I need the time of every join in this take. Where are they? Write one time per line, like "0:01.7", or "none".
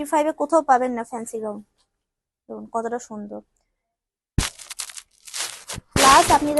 none